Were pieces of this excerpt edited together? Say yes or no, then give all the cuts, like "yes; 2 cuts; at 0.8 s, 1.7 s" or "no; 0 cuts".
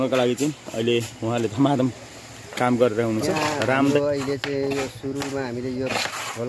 yes; 1 cut; at 3.9 s